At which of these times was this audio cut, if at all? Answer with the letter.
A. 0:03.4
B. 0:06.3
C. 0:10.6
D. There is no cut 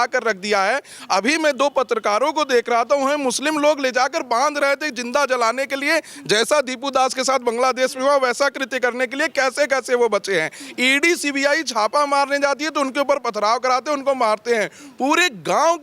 D